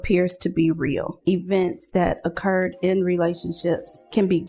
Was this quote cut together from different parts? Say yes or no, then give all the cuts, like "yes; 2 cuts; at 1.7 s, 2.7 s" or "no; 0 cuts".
yes; 1 cut; at 1.2 s